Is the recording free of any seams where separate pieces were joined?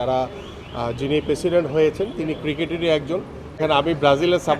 no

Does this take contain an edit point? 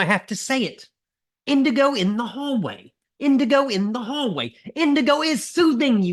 no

